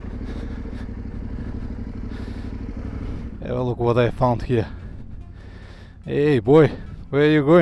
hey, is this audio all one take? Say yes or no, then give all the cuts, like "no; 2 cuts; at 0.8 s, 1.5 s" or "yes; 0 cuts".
no; 1 cut; at 3.3 s